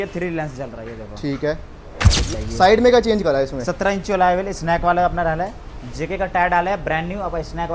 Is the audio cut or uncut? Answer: cut